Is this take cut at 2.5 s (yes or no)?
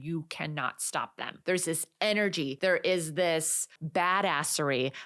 yes